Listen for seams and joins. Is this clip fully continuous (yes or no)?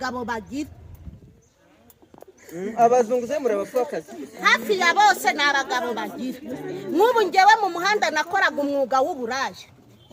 yes